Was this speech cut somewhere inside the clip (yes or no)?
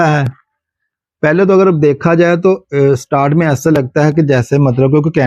no